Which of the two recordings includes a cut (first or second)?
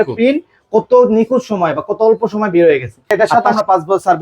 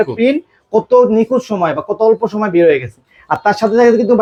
first